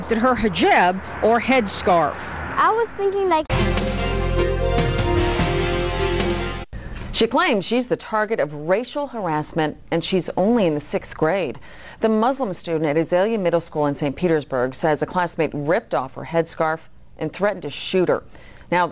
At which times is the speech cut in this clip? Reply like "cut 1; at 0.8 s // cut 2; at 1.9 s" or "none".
none